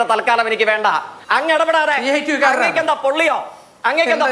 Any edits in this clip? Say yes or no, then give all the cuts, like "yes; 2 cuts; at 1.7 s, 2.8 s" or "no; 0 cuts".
yes; 1 cut; at 1.1 s